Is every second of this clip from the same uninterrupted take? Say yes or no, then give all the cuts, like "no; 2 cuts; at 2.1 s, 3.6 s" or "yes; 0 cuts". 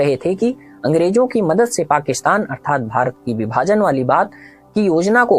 yes; 0 cuts